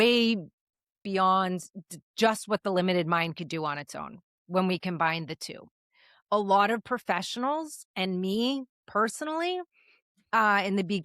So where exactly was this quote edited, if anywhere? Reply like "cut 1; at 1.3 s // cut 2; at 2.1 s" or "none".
cut 1; at 1.0 s